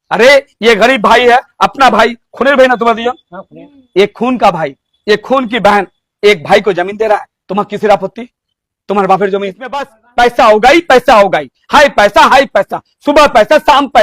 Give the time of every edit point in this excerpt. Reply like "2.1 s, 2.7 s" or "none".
10.0 s